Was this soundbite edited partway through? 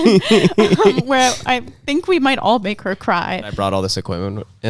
yes; 1 cut; at 3.5 s

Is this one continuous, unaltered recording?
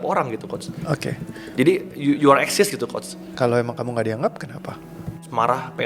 yes; 0 cuts

